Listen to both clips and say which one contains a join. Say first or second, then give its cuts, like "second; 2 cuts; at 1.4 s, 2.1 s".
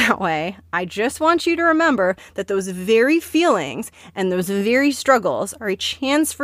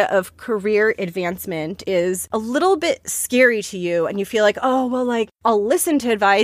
second; 2 cuts; at 1.9 s, 5.3 s